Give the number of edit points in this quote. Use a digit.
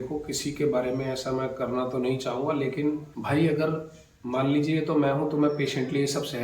1